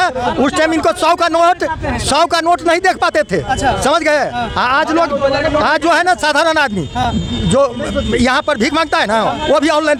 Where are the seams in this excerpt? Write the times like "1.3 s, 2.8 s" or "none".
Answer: none